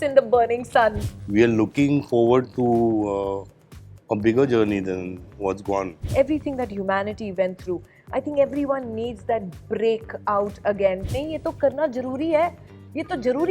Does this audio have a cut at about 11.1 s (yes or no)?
yes